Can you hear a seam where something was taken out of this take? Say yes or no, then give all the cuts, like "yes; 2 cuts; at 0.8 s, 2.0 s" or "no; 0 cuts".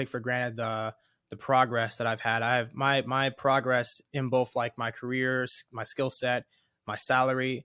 no; 0 cuts